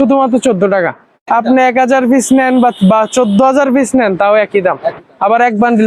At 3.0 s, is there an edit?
no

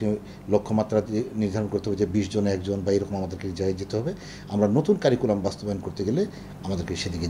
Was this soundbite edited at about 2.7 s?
no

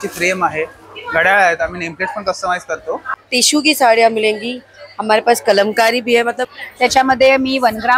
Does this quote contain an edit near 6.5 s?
yes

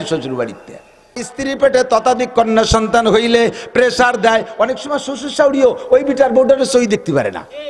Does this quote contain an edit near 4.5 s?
no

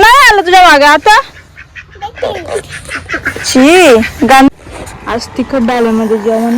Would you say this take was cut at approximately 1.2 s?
no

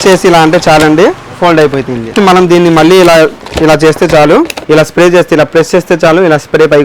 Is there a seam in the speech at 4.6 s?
yes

